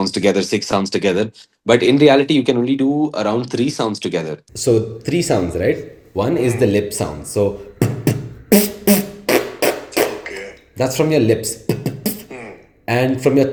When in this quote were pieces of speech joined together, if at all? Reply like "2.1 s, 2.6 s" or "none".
none

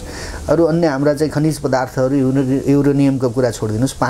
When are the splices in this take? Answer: none

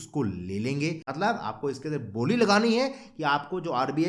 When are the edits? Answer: 1.1 s

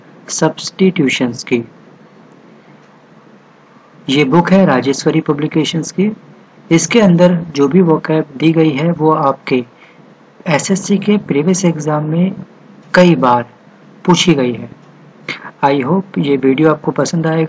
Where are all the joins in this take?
none

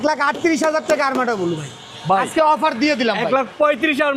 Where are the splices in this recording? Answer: none

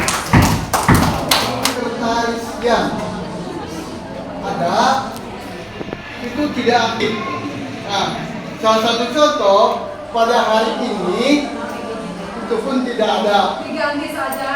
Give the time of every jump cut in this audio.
1.8 s

